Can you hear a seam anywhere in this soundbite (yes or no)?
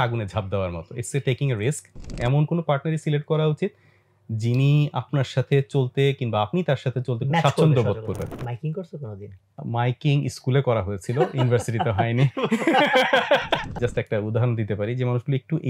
yes